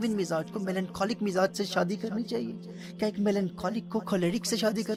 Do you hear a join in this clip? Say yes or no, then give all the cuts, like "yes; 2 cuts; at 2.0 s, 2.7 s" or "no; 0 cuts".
no; 0 cuts